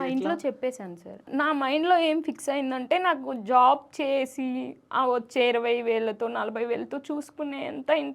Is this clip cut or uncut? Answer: cut